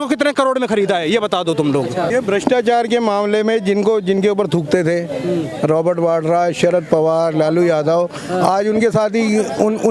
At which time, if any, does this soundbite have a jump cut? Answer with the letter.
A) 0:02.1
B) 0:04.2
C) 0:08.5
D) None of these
A